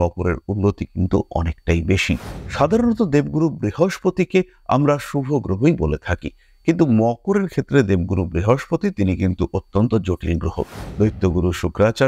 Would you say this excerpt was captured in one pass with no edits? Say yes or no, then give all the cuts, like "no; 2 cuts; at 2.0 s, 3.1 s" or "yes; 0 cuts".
no; 2 cuts; at 2.3 s, 10.8 s